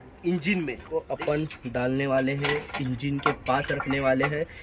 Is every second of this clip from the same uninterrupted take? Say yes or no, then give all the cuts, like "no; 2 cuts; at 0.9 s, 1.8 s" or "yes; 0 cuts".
no; 1 cut; at 1.1 s